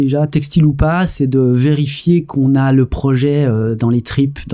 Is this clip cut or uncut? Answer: uncut